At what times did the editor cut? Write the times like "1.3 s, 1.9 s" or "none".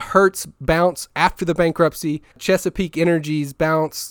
2.4 s